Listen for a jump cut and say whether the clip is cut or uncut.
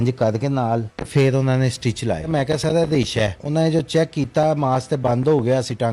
cut